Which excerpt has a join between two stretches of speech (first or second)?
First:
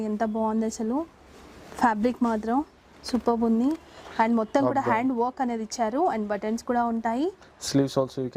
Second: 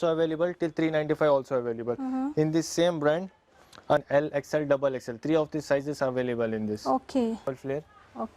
second